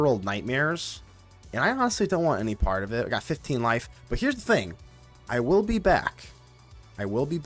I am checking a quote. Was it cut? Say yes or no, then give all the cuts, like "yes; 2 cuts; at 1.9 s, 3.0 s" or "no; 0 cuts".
no; 0 cuts